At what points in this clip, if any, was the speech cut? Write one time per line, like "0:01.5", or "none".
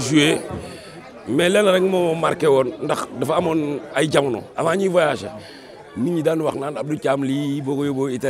none